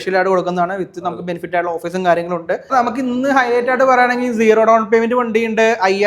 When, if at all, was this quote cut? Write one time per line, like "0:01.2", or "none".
0:02.7